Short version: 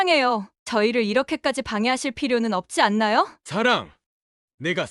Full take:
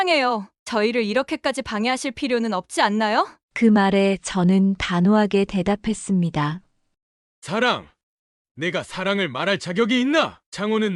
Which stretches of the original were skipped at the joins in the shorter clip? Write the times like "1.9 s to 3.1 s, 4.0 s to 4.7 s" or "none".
3.4 s to 7.4 s

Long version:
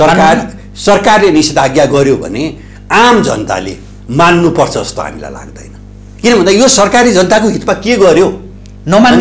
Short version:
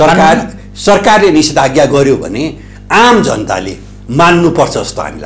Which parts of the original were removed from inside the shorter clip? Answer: none

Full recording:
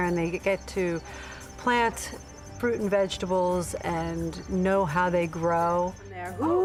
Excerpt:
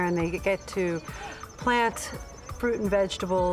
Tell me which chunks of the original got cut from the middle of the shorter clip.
none

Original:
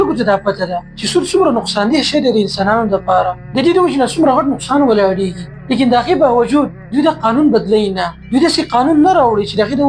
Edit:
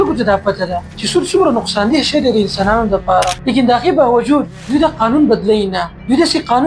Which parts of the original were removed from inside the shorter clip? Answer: 3.4 s to 5.6 s

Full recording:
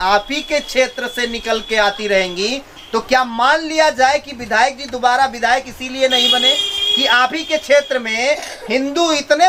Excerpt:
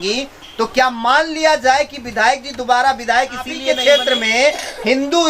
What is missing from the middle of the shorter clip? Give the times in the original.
6.0 s to 7.5 s

